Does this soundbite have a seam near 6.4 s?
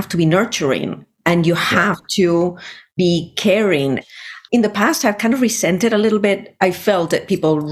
no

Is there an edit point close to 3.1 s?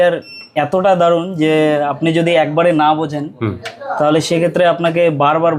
no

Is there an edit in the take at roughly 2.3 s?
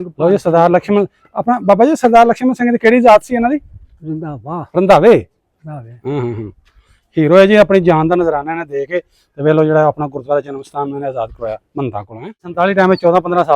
no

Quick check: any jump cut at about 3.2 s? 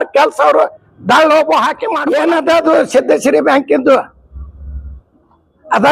no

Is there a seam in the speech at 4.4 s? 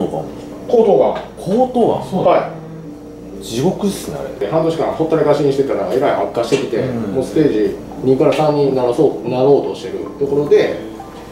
yes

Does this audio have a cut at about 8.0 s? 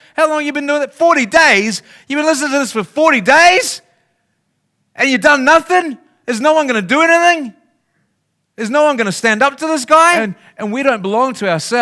no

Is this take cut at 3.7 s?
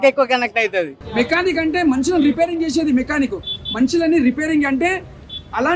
no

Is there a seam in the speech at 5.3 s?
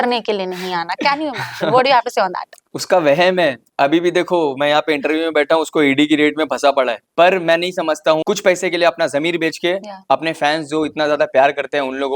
no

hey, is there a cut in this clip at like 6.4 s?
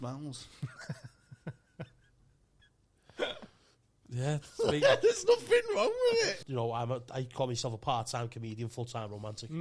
yes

